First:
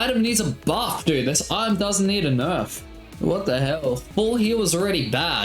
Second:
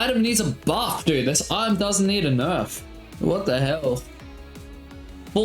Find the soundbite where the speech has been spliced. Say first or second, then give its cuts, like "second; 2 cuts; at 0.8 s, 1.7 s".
first; 1 cut; at 4.1 s